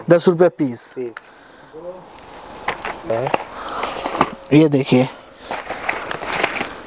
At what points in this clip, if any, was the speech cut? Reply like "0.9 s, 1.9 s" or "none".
3.1 s